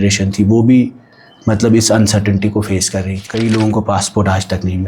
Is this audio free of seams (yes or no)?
no